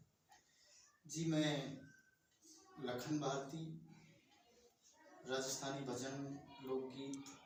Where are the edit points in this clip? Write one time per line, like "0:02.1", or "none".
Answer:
none